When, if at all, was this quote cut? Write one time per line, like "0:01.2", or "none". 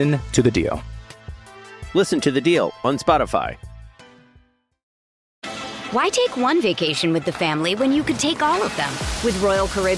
0:05.2